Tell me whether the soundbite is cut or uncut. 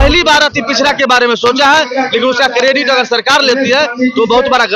uncut